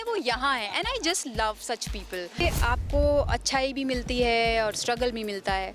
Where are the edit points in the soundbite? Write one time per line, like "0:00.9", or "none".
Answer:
0:02.4